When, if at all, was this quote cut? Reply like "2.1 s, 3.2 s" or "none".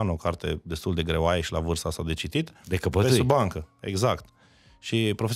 none